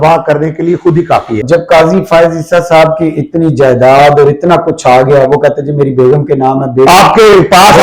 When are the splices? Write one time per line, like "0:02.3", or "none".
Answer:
0:01.4

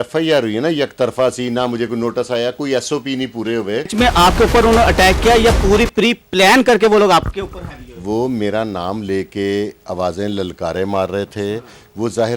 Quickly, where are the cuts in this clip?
0:03.9

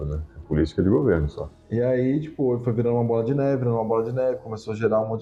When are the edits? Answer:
none

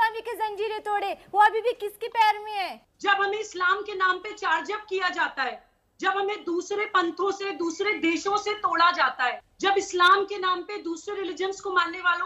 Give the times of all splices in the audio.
0:02.8
0:09.5

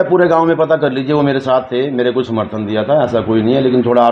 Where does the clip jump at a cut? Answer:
none

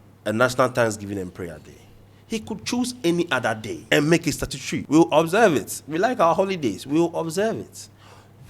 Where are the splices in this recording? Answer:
0:03.8
0:04.8

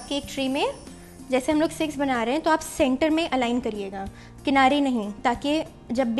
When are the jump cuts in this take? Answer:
none

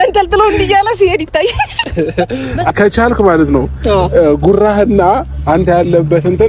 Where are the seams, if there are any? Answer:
0:02.7

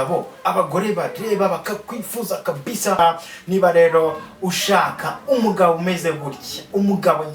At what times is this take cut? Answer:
0:03.0

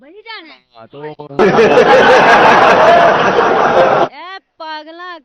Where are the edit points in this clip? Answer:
none

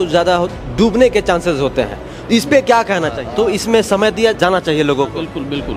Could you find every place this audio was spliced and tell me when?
0:03.2
0:04.4

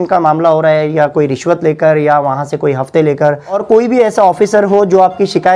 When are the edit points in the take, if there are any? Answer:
0:03.6

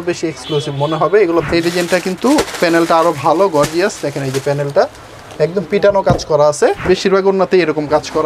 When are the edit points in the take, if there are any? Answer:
0:01.4
0:06.9

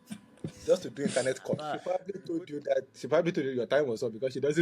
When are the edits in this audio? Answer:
0:01.8

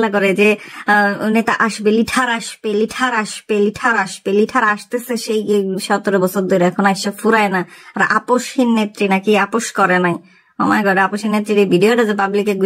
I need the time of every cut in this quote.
none

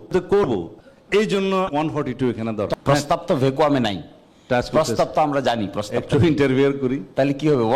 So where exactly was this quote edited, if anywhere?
0:02.7

